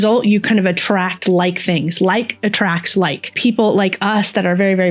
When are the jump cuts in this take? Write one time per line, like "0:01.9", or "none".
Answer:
0:03.3